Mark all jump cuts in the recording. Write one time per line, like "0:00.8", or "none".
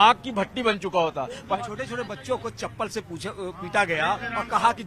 0:01.6